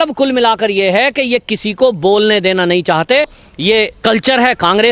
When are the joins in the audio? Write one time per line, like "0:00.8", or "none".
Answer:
0:03.4